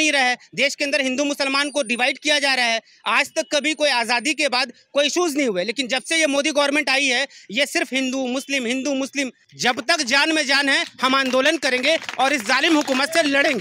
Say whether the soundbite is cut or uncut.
cut